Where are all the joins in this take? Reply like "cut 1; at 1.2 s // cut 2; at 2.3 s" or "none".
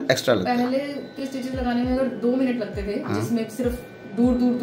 none